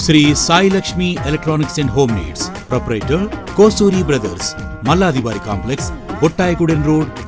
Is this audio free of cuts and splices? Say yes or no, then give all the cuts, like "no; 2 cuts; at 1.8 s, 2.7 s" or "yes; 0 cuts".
yes; 0 cuts